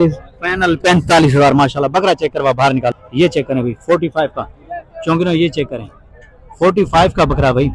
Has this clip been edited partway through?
yes; 1 cut; at 3.0 s

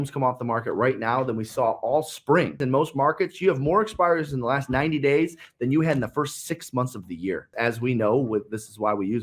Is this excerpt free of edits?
no; 2 cuts; at 2.6 s, 7.5 s

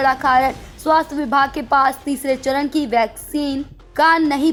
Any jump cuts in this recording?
no; 0 cuts

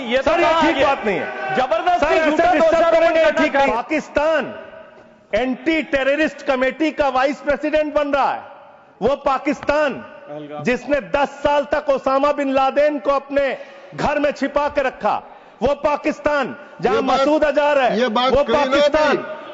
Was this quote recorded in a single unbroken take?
no; 1 cut; at 3.7 s

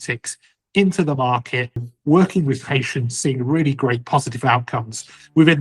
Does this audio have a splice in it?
yes; 1 cut; at 1.9 s

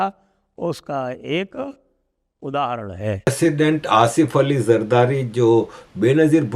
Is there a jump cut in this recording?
yes; 1 cut; at 3.3 s

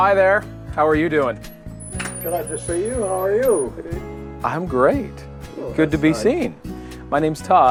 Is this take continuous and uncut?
yes; 0 cuts

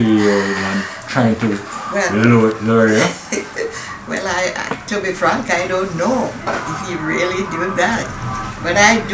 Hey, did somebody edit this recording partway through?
no; 0 cuts

